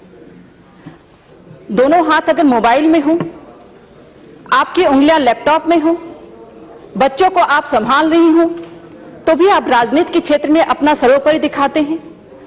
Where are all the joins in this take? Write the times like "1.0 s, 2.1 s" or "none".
2.2 s